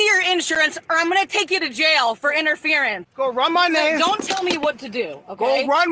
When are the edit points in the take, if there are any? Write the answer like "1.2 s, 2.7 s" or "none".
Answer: 3.0 s

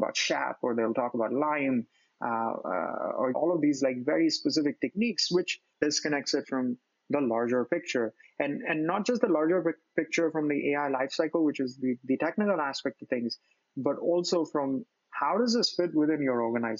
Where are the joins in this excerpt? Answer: 3.4 s, 5.8 s

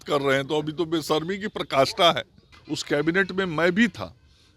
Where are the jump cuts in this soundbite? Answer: 2.3 s

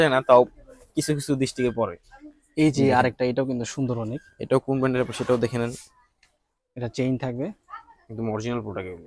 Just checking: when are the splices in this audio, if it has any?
none

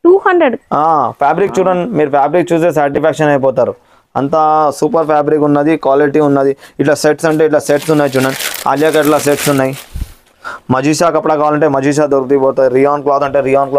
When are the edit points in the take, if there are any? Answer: none

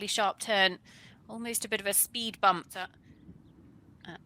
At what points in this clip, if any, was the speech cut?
3.0 s

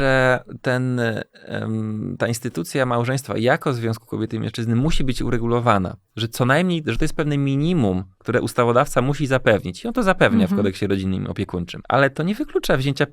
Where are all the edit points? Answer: 11.8 s

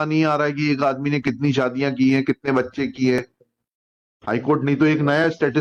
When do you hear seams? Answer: none

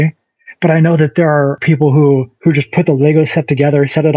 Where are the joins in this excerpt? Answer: 1.6 s, 2.3 s

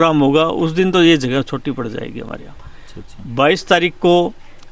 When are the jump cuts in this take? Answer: none

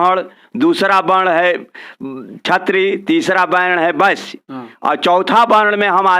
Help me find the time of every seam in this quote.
none

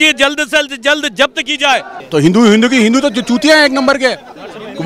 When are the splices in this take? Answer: 2.0 s

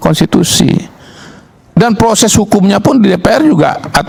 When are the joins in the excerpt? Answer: none

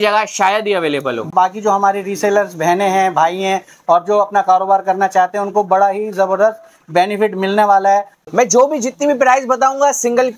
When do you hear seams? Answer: 1.3 s, 8.2 s

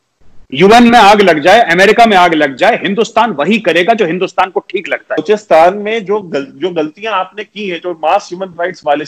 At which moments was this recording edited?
5.2 s

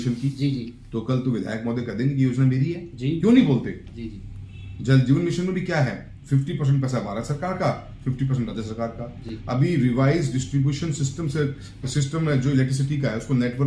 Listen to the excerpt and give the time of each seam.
none

